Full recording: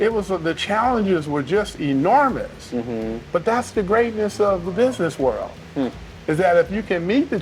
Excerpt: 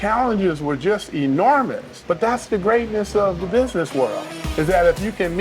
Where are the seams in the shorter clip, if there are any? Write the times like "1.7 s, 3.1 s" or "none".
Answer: 1.9 s, 4.4 s